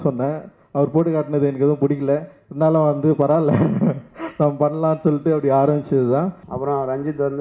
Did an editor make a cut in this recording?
yes; 1 cut; at 6.4 s

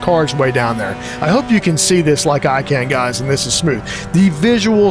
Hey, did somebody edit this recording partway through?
no; 0 cuts

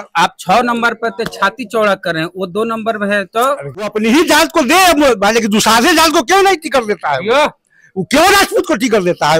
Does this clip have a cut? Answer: yes; 1 cut; at 3.9 s

